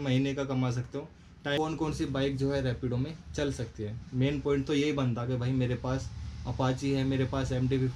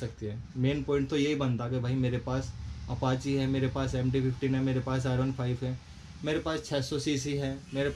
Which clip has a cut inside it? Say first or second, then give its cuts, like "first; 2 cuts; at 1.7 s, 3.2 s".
first; 1 cut; at 1.6 s